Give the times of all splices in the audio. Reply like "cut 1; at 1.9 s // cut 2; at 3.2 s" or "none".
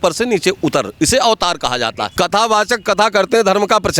cut 1; at 2.0 s